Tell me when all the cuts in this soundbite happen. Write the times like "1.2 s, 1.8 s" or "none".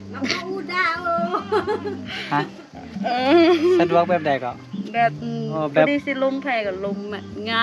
5.6 s